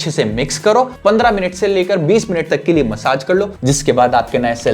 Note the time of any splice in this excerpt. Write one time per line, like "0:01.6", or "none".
0:00.9
0:03.5